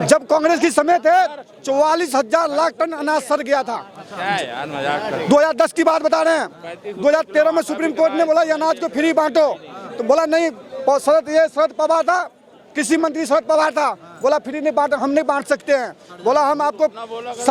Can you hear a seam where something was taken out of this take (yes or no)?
no